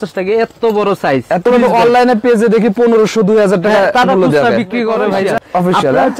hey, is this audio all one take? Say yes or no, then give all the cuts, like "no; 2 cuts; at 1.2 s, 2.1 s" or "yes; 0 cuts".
no; 2 cuts; at 1.4 s, 5.4 s